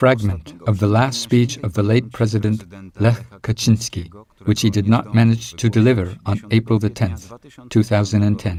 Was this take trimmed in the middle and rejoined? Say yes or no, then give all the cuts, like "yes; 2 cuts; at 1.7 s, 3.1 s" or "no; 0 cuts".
no; 0 cuts